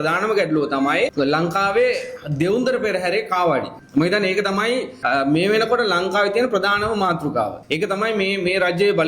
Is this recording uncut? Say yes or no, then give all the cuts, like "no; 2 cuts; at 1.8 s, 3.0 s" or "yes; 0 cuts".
no; 4 cuts; at 1.1 s, 3.8 s, 4.9 s, 7.6 s